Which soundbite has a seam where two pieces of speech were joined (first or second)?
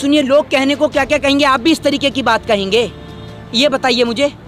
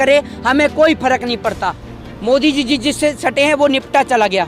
second